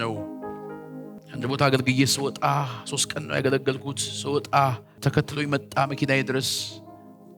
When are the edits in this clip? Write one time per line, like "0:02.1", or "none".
0:01.2
0:04.9